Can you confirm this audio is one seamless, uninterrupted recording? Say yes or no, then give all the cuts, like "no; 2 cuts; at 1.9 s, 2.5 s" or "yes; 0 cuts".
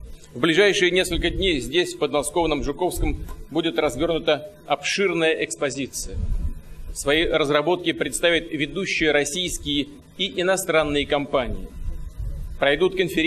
no; 1 cut; at 5.7 s